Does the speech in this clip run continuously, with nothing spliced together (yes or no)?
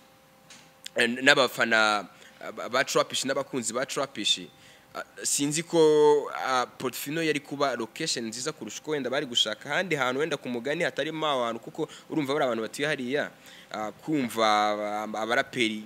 yes